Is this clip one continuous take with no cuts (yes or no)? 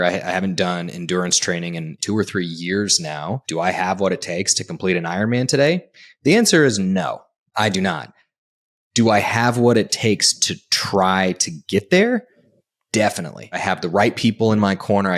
no